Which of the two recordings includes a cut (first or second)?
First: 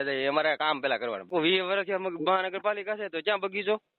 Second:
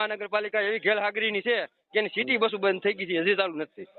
first